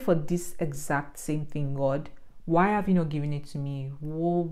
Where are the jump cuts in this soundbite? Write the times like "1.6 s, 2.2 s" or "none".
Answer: none